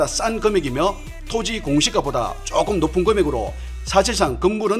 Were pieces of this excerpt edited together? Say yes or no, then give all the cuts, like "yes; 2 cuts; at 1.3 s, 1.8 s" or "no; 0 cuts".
no; 0 cuts